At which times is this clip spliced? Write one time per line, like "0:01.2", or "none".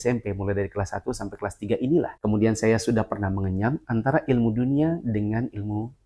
none